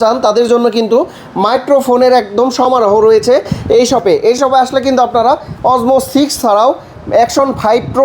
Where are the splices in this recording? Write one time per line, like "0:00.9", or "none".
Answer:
none